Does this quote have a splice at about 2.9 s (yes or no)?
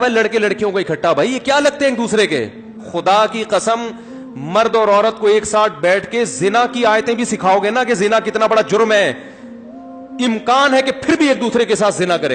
yes